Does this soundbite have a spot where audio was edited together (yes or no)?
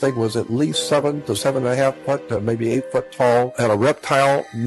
yes